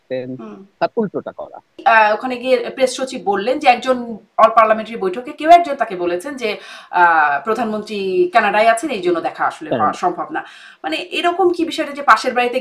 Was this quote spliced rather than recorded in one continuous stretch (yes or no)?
yes